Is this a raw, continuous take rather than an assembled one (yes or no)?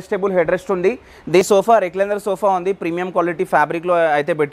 no